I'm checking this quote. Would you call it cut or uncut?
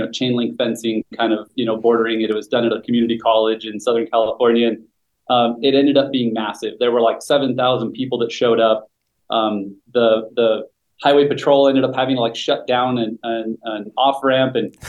uncut